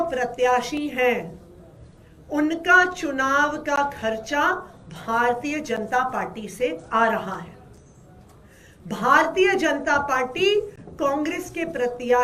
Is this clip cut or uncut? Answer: uncut